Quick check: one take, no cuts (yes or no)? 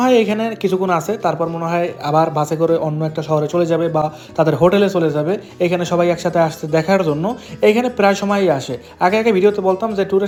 yes